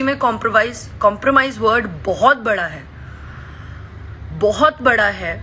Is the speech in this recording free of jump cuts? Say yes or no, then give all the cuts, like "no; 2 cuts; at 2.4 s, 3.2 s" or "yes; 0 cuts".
yes; 0 cuts